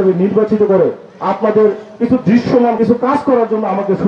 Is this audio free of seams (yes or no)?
no